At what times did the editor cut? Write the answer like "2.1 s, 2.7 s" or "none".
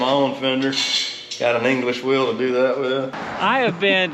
3.2 s